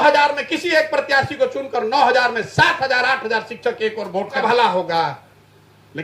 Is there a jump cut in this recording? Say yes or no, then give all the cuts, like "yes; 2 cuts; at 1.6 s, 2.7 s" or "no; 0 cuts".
yes; 1 cut; at 4.4 s